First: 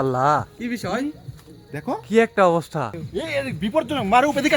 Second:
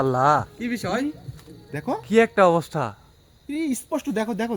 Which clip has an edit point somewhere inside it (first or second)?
first